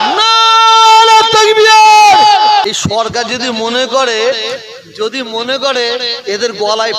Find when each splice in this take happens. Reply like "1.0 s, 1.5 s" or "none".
2.6 s